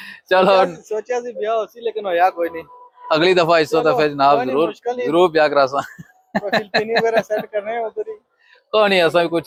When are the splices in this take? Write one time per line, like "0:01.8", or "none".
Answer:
none